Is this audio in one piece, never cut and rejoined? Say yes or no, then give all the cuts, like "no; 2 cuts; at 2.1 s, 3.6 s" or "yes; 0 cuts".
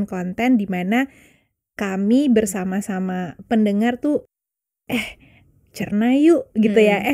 yes; 0 cuts